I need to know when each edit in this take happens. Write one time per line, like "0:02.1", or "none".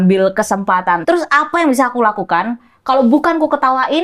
0:01.0